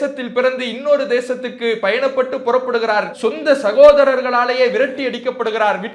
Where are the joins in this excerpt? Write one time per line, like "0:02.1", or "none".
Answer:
0:03.1